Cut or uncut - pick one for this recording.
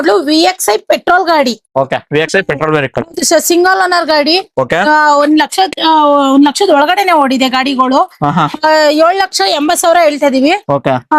uncut